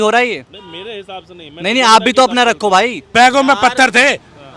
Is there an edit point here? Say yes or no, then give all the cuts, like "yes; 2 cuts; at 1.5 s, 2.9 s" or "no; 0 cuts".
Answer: yes; 1 cut; at 3.0 s